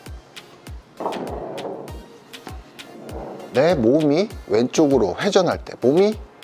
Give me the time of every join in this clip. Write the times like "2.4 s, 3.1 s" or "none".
3.4 s